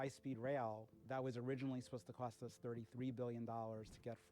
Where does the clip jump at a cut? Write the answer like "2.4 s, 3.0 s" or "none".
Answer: 1.0 s